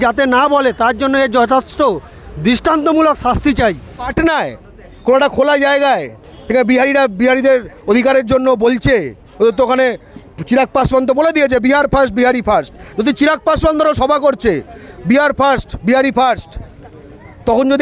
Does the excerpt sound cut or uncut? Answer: cut